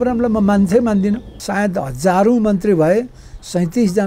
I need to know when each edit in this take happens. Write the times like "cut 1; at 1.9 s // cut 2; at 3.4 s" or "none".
cut 1; at 1.4 s